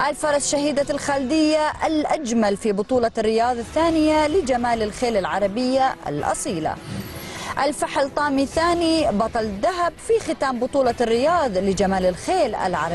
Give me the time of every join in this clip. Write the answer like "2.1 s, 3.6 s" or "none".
none

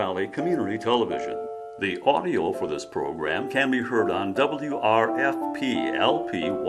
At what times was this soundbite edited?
none

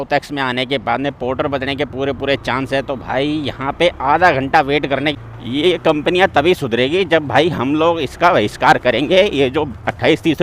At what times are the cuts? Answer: 5.1 s

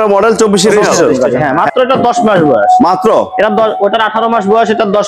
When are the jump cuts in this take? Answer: 1.2 s

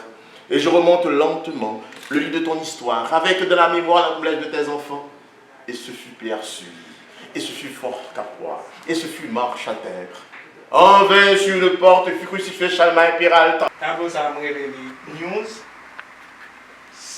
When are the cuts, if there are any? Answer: 13.8 s

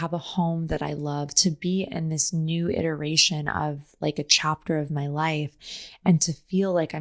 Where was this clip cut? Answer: none

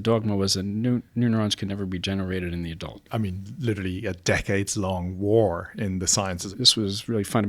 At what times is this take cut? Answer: 3.0 s, 6.4 s

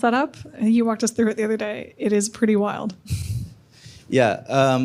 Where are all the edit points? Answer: none

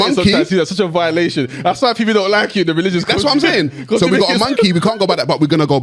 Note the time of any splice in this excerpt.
none

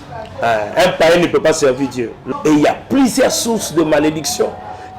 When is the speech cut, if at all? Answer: 2.2 s

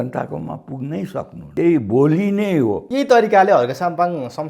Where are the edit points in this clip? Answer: 1.4 s, 2.8 s

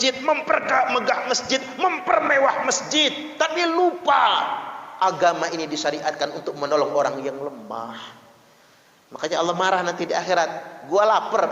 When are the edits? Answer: none

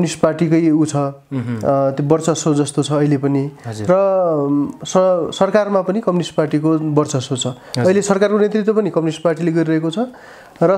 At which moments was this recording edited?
none

